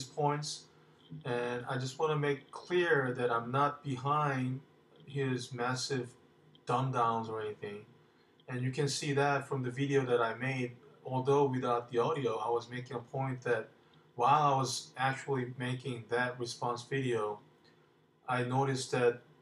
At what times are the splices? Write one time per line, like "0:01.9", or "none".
0:17.0